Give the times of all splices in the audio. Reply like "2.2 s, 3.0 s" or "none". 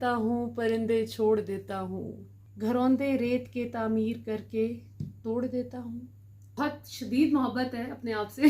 2.6 s, 6.6 s

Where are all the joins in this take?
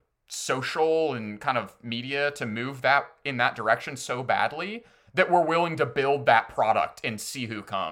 none

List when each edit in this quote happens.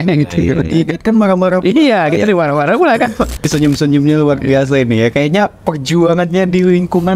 3.5 s

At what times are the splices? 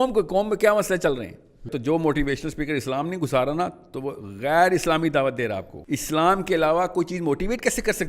1.7 s, 5.7 s

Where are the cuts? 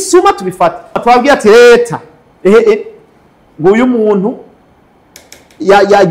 0.9 s

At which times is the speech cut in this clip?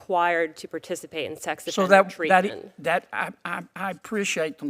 none

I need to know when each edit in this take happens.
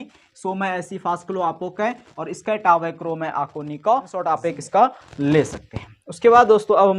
4.4 s

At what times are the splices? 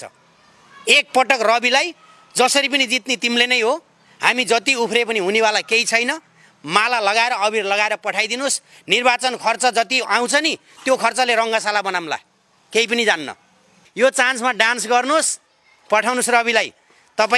13.8 s

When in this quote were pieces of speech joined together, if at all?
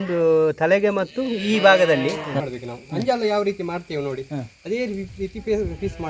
2.5 s

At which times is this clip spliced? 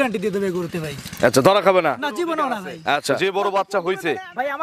3.2 s

